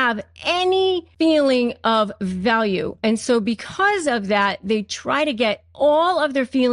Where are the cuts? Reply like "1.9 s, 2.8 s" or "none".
1.1 s